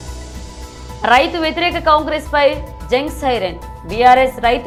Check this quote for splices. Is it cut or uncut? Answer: uncut